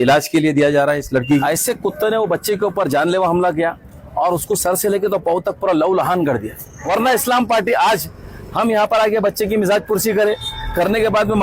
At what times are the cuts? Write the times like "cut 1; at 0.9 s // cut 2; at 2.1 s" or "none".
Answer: cut 1; at 1.4 s // cut 2; at 6.8 s